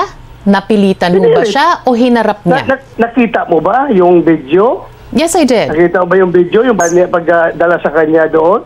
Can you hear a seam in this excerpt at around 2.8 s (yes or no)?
no